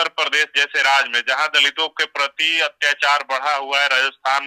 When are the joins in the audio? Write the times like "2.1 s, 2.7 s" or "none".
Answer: none